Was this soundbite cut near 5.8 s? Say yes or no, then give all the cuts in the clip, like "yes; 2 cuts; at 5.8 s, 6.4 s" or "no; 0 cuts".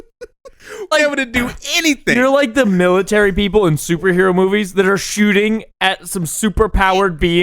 no; 1 cut; at 0.9 s